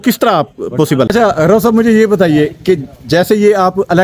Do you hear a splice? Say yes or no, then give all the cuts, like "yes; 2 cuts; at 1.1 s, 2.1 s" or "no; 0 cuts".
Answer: yes; 1 cut; at 1.1 s